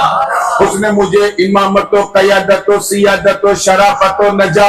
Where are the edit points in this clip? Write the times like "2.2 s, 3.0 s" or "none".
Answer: none